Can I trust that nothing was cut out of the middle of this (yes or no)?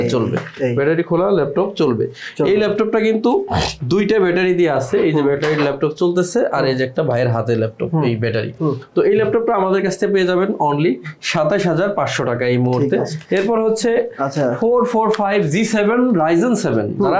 yes